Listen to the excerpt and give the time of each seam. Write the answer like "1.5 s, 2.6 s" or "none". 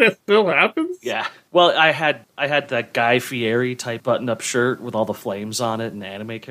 2.3 s, 3.9 s